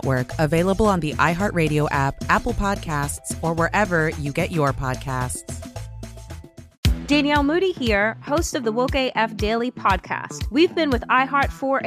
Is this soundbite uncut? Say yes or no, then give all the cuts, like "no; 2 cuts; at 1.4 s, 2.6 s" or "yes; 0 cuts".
no; 1 cut; at 6.7 s